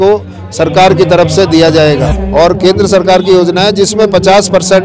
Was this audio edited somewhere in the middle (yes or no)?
yes